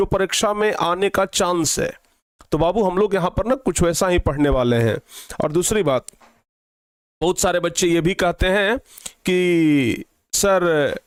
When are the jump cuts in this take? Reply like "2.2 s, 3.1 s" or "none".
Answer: none